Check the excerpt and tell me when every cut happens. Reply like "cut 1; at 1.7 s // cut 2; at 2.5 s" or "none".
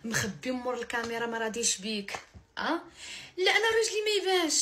none